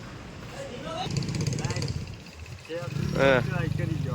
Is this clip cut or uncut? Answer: cut